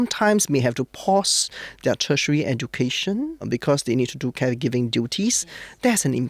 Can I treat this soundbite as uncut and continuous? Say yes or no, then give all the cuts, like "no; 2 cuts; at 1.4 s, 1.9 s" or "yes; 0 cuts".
no; 1 cut; at 3.5 s